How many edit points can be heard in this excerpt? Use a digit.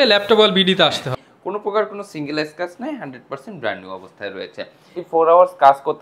2